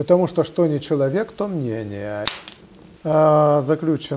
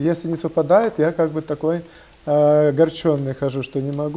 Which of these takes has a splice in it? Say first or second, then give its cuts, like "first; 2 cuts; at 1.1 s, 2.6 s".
first; 1 cut; at 2.3 s